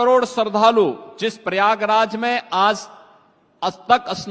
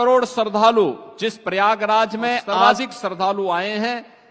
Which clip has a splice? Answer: second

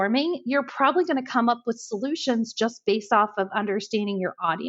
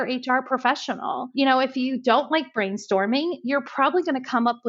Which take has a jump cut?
second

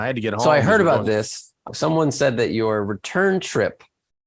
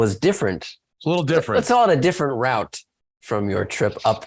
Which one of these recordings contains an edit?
first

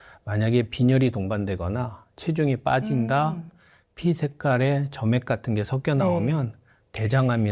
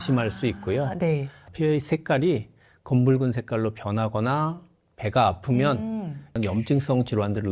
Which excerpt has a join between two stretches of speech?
second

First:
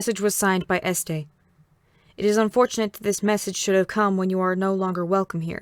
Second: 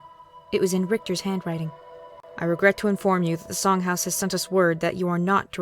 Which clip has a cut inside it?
second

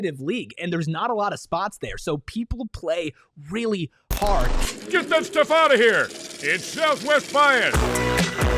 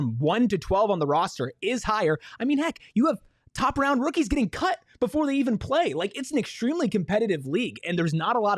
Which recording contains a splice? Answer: first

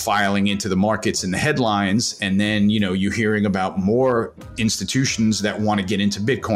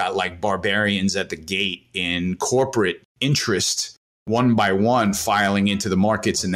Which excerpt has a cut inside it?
second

